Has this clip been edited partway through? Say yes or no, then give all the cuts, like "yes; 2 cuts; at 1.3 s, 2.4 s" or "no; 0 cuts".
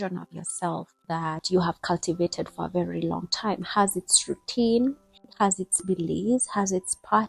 yes; 2 cuts; at 1.4 s, 5.3 s